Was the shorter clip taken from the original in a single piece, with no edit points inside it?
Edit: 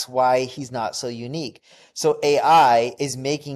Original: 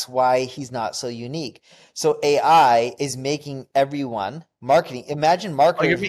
yes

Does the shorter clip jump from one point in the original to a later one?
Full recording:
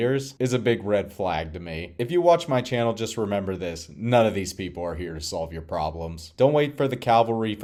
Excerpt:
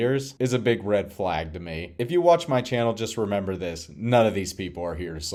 no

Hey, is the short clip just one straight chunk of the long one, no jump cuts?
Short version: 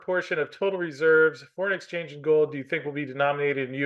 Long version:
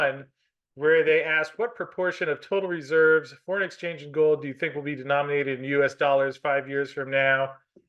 yes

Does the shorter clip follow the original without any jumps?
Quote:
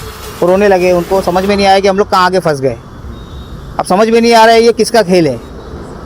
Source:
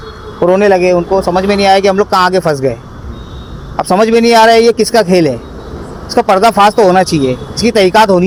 yes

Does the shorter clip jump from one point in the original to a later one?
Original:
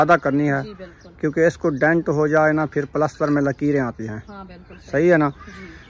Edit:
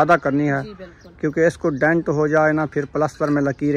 no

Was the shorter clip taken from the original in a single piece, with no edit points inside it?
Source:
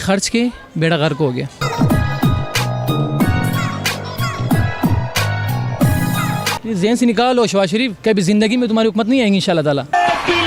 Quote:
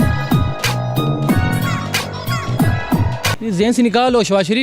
no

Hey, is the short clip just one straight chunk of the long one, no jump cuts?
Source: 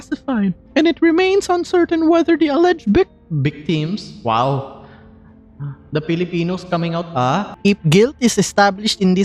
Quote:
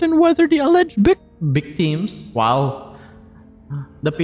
yes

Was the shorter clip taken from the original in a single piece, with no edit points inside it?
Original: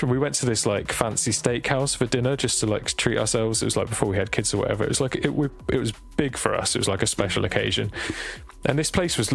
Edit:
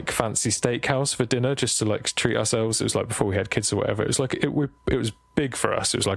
yes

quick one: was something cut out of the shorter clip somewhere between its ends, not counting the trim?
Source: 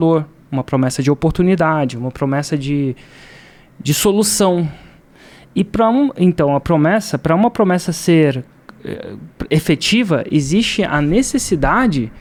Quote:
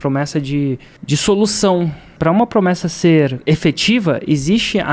yes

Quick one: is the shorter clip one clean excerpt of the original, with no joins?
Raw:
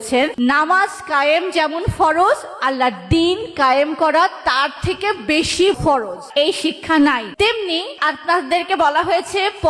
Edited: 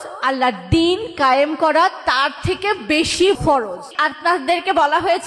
no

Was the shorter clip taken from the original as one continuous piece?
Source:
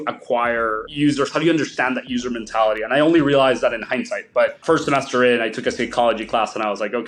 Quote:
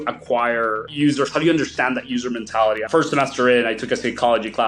no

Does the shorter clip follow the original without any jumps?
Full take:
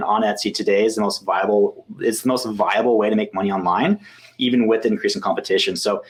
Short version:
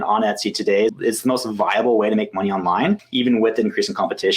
no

